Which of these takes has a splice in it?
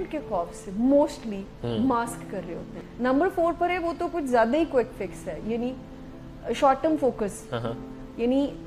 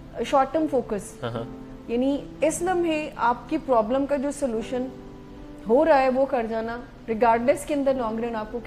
first; 1 cut; at 2.8 s

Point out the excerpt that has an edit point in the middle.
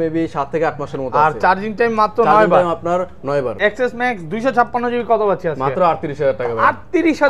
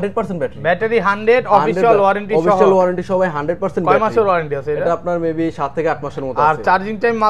first; 1 cut; at 3.6 s

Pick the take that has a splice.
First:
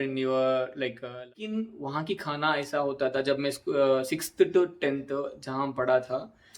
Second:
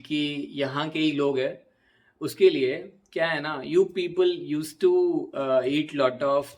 first; 1 cut; at 1.4 s

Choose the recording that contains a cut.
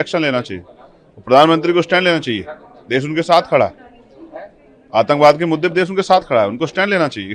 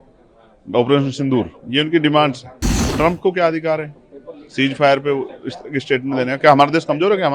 second; 1 cut; at 2.8 s

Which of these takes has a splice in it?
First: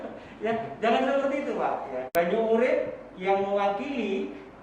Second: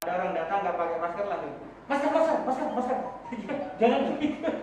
first; 1 cut; at 2.0 s

